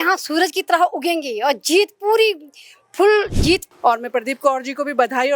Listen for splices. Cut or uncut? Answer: cut